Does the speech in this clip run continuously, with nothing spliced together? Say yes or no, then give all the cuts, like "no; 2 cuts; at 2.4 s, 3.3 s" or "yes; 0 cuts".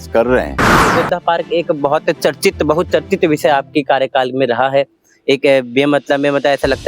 no; 1 cut; at 0.9 s